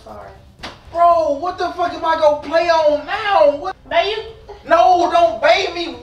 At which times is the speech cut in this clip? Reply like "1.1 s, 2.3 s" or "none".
3.7 s